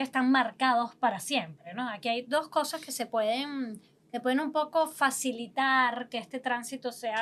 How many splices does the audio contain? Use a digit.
0